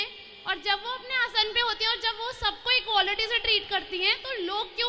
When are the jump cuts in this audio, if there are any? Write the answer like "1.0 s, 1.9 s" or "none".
none